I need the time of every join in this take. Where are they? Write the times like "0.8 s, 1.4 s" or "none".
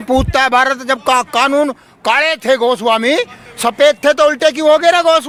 none